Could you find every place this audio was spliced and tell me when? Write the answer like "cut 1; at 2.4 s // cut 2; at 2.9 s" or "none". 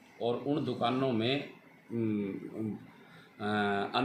none